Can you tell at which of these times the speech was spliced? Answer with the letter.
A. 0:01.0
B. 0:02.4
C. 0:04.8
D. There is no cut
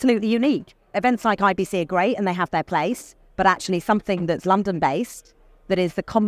A